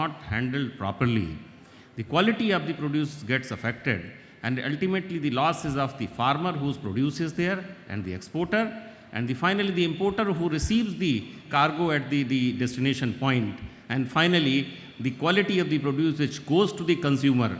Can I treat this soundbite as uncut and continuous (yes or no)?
no